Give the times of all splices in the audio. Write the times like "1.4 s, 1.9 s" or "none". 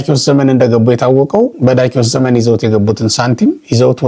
none